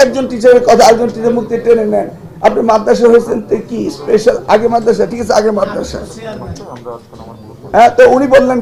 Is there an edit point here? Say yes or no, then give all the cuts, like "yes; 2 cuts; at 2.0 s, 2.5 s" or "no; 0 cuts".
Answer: no; 0 cuts